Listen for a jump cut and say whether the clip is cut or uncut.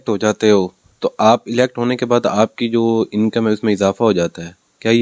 uncut